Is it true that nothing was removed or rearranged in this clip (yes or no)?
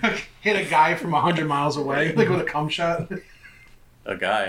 yes